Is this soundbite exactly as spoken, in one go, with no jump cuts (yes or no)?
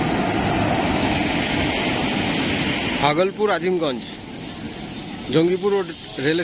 no